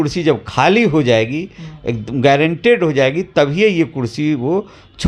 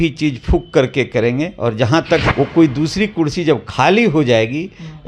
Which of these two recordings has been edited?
second; 1 cut; at 2.3 s

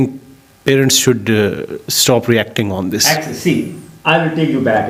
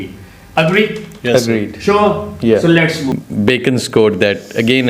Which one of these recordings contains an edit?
second; 1 cut; at 3.1 s

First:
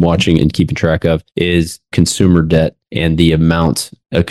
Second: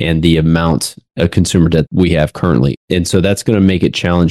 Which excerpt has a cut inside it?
second; 1 cut; at 2.7 s

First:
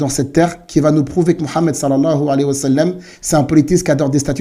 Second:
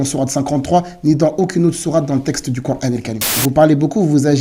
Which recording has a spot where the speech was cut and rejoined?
second; 1 cut; at 3.2 s

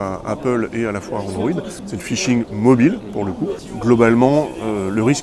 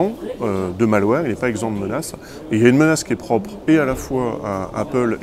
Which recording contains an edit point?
first; 2 cuts; at 1.8 s, 3.6 s

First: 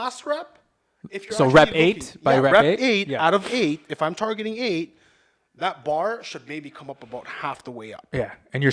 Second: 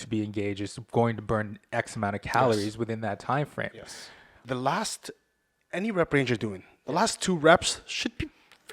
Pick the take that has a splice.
second; 1 cut; at 4.5 s

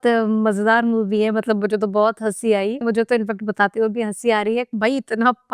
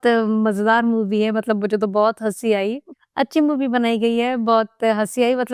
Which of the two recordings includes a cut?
first; 2 cuts; at 2.8 s, 4.7 s

